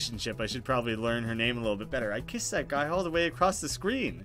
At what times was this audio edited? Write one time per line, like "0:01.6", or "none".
none